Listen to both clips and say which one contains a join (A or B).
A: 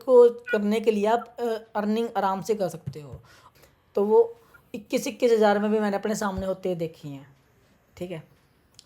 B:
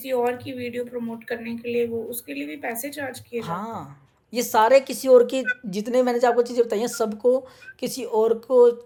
A